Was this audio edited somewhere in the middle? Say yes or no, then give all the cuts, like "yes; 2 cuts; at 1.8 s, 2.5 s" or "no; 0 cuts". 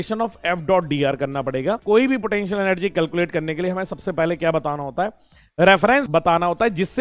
yes; 2 cuts; at 1.8 s, 6.1 s